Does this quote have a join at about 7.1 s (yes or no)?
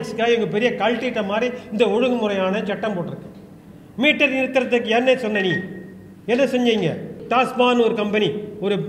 yes